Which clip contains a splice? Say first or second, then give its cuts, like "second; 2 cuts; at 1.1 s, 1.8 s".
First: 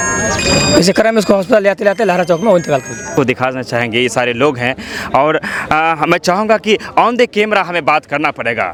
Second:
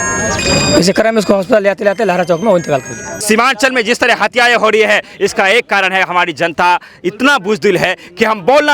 second; 1 cut; at 3.0 s